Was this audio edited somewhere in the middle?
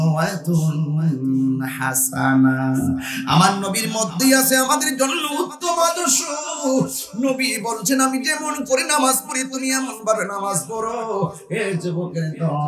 no; 0 cuts

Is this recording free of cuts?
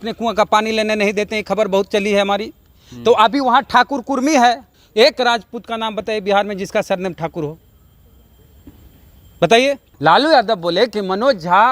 no; 2 cuts; at 4.7 s, 9.9 s

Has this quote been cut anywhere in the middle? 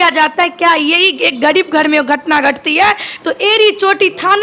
no; 0 cuts

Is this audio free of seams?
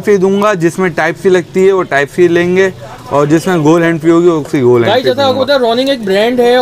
yes; 0 cuts

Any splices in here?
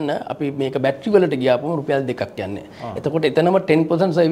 no; 0 cuts

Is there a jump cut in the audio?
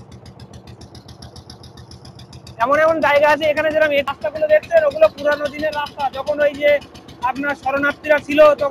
yes; 1 cut; at 4.1 s

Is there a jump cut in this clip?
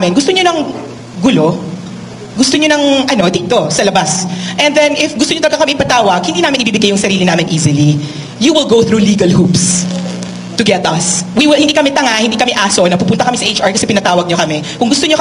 no; 0 cuts

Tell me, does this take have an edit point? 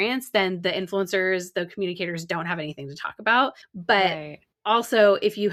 no; 0 cuts

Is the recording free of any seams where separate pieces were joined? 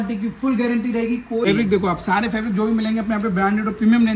no; 1 cut; at 1.5 s

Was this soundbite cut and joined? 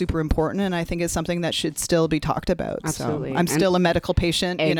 no; 0 cuts

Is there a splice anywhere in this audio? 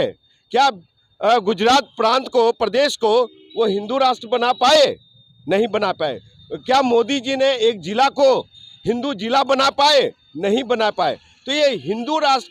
no; 0 cuts

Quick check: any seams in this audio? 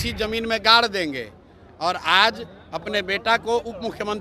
no; 0 cuts

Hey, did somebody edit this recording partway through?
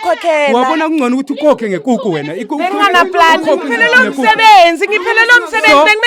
no; 0 cuts

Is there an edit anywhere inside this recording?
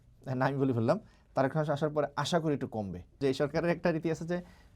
yes; 1 cut; at 3.2 s

